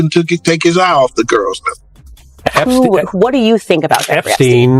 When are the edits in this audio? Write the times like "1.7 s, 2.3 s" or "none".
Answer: 2.2 s